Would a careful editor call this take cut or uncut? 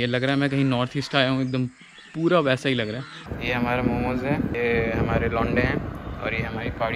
cut